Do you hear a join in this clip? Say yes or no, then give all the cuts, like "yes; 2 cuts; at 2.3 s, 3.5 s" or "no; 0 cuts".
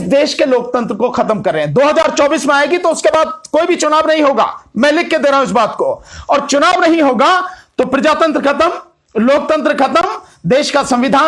no; 0 cuts